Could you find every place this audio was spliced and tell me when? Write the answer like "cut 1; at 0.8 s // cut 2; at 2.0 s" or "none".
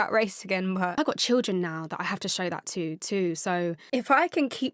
cut 1; at 0.9 s // cut 2; at 3.8 s

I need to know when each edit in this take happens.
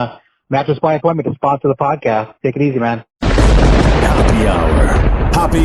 cut 1; at 3.1 s

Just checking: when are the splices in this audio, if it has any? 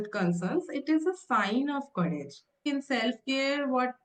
cut 1; at 2.7 s

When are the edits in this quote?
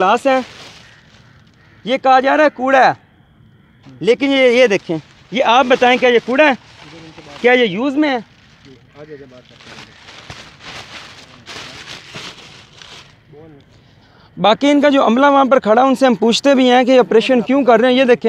none

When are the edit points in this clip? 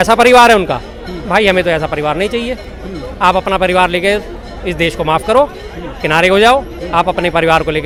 none

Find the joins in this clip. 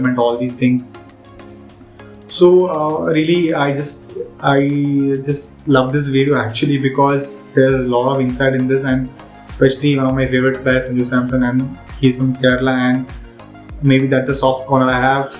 none

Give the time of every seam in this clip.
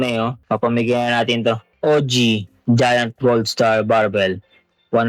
cut 1; at 1.7 s

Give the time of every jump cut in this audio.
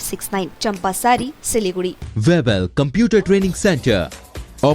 cut 1; at 2.0 s

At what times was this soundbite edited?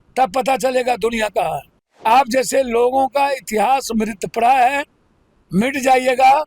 cut 1; at 2.0 s

